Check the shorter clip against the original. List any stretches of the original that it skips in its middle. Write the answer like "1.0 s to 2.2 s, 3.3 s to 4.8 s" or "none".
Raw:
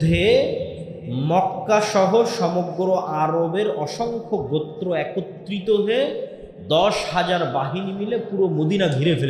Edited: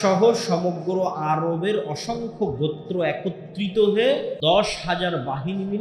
6.2 s to 6.6 s